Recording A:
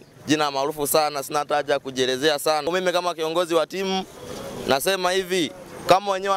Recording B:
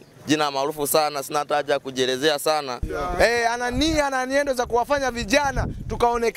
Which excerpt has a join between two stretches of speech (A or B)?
B